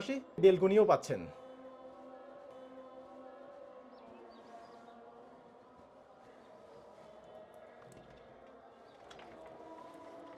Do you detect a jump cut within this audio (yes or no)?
no